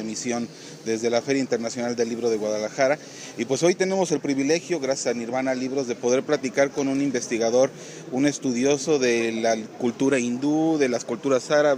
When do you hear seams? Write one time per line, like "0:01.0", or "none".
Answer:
0:08.6